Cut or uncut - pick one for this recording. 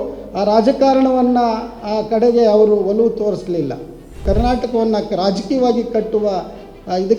cut